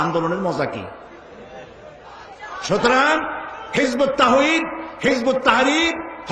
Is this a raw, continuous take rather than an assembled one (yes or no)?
no